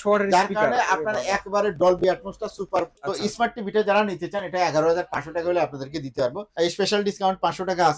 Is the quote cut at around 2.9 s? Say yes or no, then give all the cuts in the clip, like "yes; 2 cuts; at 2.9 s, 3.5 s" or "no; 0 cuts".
yes; 2 cuts; at 2.9 s, 6.4 s